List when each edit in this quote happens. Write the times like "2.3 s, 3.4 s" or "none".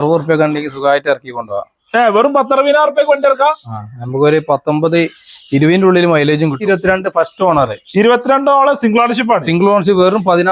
6.6 s

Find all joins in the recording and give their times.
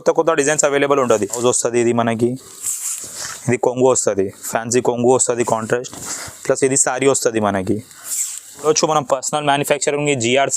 1.4 s, 8.6 s

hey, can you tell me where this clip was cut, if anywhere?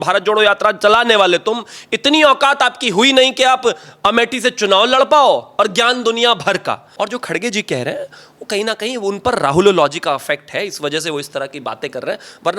6.9 s

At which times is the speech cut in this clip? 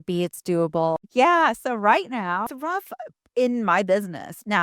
1.0 s, 2.5 s

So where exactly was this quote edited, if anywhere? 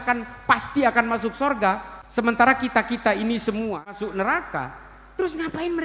2.0 s, 4.0 s

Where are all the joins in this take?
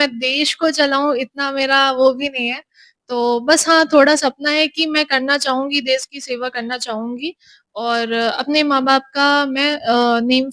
none

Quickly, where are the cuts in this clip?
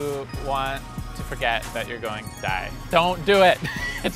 2.8 s

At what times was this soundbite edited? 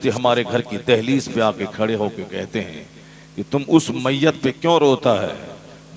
none

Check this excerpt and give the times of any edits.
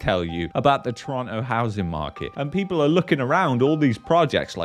2.3 s

